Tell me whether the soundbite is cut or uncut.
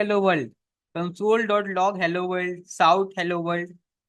uncut